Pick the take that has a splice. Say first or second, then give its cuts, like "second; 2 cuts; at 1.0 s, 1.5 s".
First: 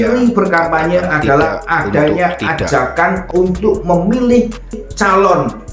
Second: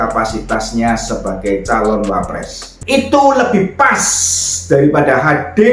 second; 1 cut; at 2.7 s